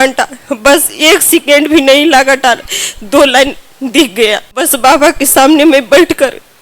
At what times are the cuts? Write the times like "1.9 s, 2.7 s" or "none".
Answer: 4.6 s